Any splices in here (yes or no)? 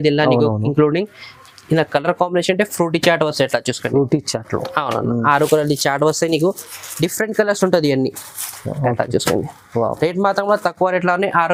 no